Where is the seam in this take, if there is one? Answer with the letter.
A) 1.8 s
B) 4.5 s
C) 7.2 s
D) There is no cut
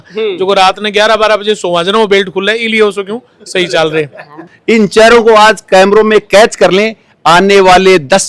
B